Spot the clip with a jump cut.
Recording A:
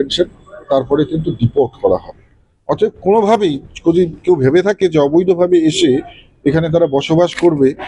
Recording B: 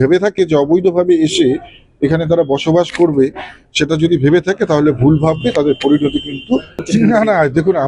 B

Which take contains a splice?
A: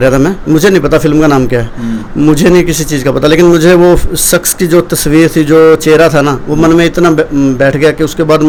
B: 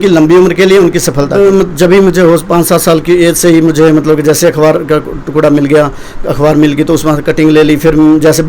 B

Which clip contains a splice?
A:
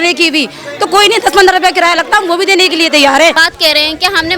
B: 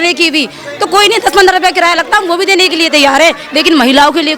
A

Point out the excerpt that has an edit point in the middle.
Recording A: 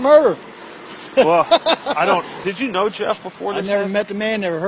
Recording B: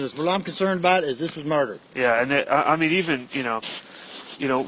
A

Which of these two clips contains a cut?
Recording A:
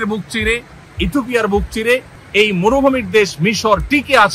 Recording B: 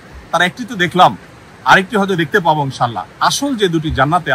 A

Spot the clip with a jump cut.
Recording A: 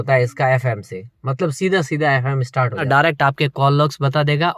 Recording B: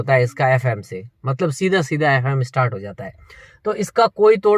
A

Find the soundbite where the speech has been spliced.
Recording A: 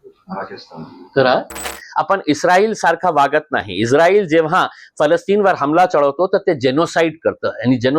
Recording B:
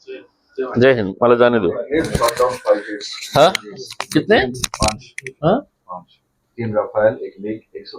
A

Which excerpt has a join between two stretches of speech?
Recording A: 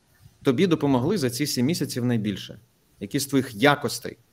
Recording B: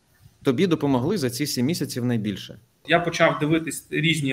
B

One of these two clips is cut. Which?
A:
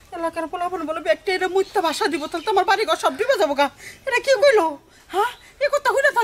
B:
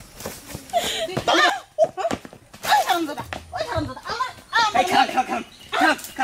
B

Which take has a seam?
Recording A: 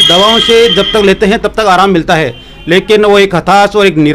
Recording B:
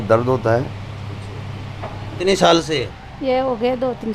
B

